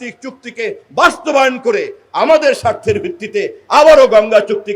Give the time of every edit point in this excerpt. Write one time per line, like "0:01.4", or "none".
none

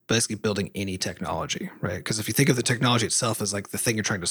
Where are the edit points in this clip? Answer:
none

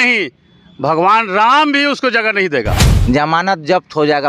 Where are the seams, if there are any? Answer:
0:02.8

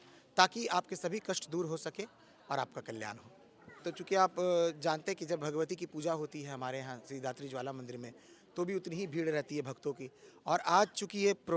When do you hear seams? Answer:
0:03.8

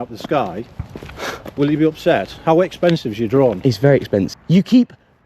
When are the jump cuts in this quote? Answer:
0:04.3

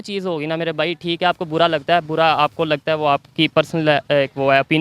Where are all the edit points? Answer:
none

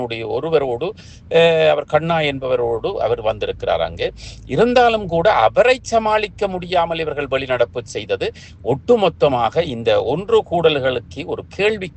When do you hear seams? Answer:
none

